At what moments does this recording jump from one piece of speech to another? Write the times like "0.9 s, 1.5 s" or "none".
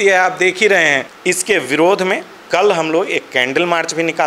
1.1 s